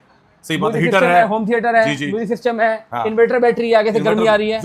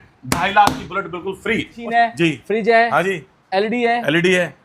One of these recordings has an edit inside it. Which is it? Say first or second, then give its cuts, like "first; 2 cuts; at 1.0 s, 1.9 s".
second; 1 cut; at 1.8 s